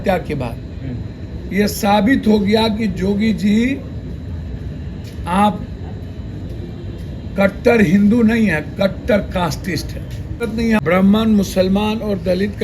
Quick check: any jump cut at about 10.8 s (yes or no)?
yes